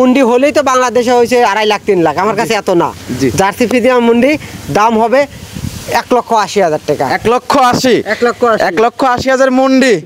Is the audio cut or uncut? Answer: uncut